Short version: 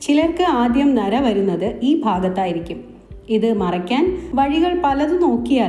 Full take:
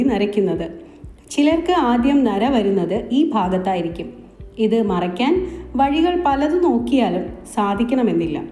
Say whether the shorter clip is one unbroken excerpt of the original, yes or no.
no